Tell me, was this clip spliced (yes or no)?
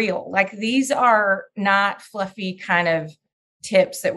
no